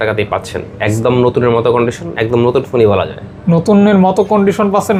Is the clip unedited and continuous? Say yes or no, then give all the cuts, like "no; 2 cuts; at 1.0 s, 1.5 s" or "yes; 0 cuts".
yes; 0 cuts